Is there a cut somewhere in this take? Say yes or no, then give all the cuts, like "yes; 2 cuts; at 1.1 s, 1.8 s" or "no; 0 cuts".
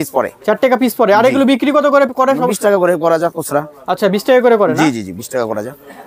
no; 0 cuts